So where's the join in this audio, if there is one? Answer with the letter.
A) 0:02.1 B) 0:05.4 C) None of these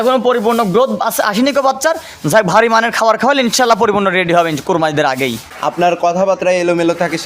B